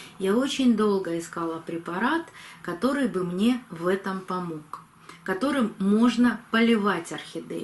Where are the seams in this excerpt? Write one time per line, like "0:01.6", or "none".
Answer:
none